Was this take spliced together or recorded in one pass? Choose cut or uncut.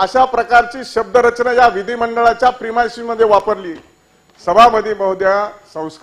uncut